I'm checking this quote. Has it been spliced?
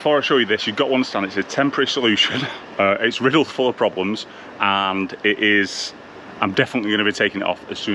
no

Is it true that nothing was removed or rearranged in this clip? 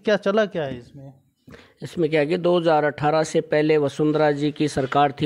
yes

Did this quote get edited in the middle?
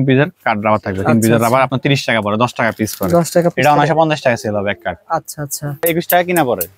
yes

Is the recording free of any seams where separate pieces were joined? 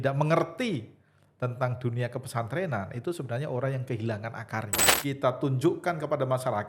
no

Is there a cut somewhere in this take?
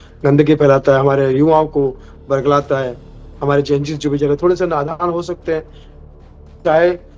no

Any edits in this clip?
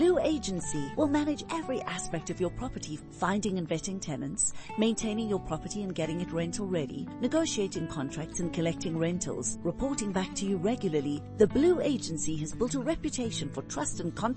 no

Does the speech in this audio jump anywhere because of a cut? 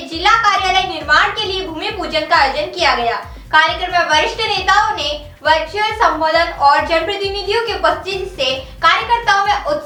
no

